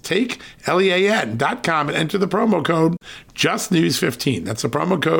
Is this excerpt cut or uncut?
uncut